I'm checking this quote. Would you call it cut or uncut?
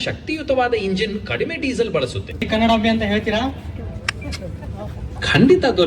cut